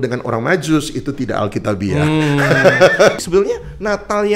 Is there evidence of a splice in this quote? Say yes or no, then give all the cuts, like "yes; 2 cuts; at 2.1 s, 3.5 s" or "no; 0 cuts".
yes; 1 cut; at 3.2 s